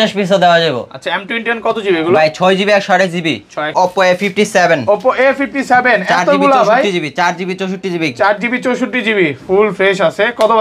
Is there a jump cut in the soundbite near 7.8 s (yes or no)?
no